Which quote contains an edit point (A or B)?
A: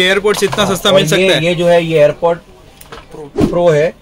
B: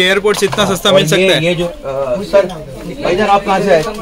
B